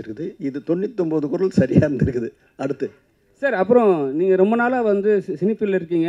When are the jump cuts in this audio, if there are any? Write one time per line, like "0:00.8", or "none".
none